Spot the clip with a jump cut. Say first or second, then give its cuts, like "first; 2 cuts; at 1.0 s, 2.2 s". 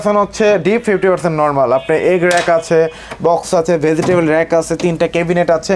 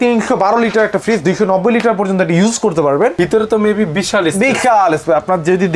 second; 1 cut; at 3.1 s